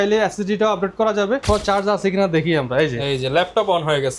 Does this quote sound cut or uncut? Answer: cut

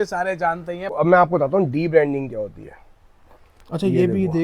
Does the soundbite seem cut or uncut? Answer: cut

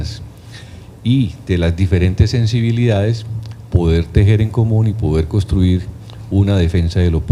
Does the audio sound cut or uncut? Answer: cut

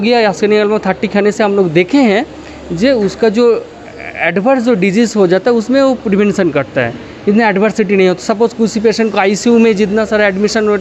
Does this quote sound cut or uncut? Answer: uncut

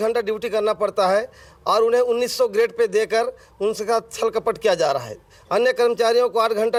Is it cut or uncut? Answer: uncut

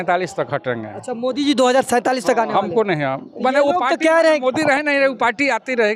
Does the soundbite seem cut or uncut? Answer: uncut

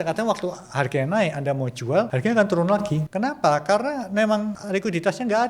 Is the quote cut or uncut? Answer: cut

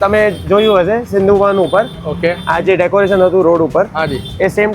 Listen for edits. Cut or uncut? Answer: uncut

